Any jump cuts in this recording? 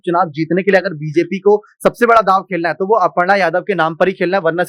no; 0 cuts

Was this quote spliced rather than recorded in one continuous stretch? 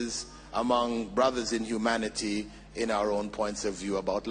no; 0 cuts

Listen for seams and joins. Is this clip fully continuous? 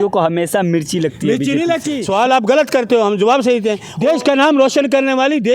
no; 2 cuts; at 1.9 s, 3.8 s

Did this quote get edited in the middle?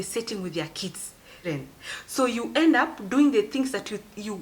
yes; 1 cut; at 1.4 s

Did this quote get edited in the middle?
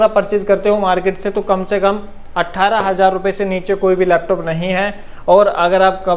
no; 0 cuts

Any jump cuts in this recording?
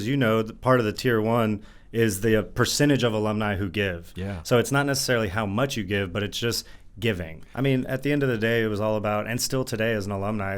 yes; 1 cut; at 7.4 s

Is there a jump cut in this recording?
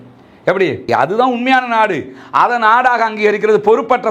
no; 0 cuts

